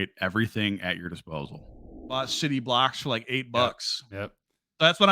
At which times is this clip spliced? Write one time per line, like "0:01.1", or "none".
0:02.2